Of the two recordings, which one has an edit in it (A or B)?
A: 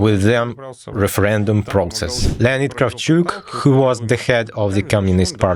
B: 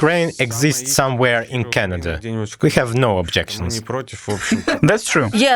A